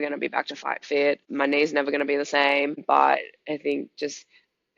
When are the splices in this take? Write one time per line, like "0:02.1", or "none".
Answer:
0:01.3
0:02.8